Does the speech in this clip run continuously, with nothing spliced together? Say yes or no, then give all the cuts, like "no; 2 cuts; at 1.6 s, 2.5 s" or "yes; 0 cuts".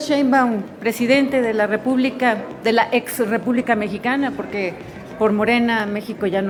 yes; 0 cuts